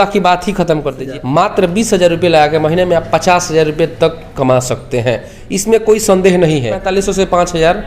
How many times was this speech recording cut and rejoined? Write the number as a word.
two